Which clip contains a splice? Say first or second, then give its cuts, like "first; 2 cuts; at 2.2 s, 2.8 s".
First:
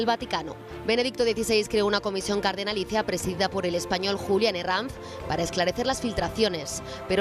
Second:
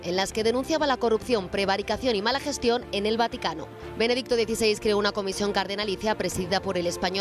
first; 1 cut; at 5.3 s